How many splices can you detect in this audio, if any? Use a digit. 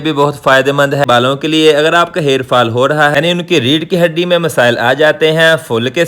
2